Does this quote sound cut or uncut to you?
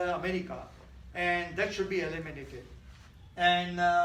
uncut